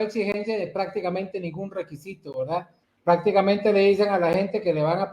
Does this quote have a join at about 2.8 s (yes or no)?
yes